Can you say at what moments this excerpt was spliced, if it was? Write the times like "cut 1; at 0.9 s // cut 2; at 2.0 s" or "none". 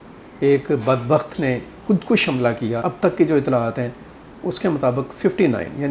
cut 1; at 1.3 s // cut 2; at 2.8 s